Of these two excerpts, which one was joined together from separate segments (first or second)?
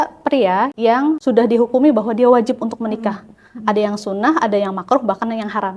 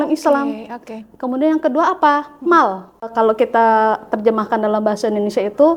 first